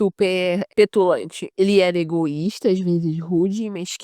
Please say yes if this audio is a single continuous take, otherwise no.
no